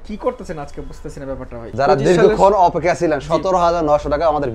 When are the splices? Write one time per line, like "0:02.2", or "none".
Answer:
0:01.7